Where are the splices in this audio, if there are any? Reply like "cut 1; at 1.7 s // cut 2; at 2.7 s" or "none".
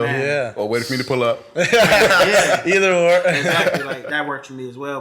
cut 1; at 4.0 s